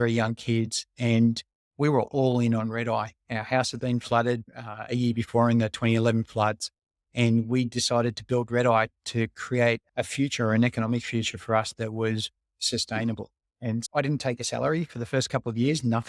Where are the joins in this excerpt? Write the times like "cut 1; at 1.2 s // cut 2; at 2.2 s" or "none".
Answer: none